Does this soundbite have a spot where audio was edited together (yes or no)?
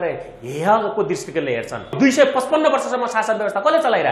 yes